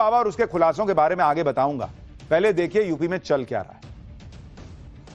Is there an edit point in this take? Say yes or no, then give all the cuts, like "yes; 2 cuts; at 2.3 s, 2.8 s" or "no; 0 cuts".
no; 0 cuts